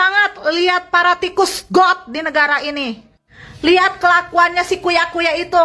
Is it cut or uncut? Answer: uncut